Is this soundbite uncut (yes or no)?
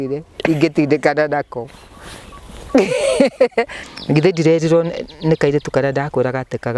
no